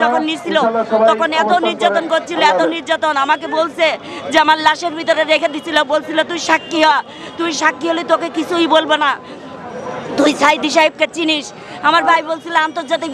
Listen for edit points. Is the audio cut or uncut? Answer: uncut